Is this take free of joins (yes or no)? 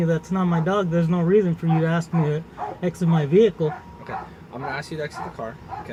yes